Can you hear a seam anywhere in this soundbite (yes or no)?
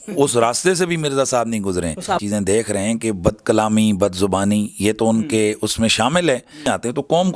yes